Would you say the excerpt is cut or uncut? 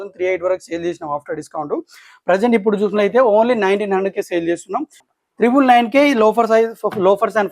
cut